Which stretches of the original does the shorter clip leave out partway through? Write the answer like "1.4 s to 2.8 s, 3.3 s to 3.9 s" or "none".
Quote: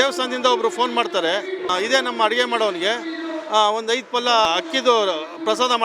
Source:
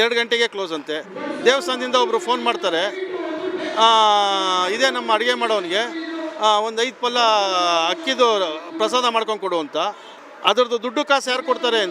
3.2 s to 4.6 s, 7.3 s to 7.8 s